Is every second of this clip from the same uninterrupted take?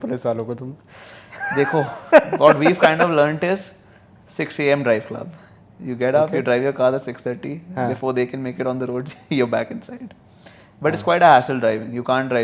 yes; 0 cuts

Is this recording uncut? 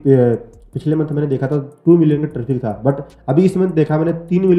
yes; 0 cuts

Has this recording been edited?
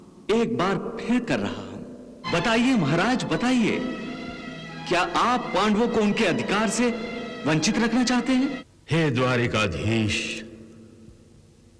yes; 2 cuts; at 2.2 s, 8.7 s

